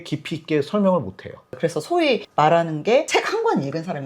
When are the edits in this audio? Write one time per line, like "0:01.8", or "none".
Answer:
0:01.5